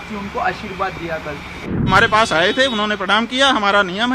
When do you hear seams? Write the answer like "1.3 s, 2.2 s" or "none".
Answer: 1.9 s